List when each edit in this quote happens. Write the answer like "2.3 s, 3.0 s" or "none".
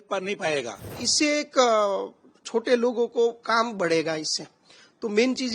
1.1 s